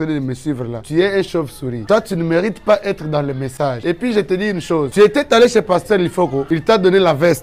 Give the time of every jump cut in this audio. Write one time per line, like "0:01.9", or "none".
none